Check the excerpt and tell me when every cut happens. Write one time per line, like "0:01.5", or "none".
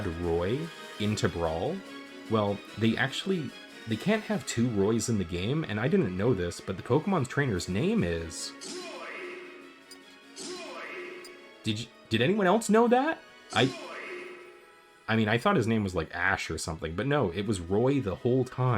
none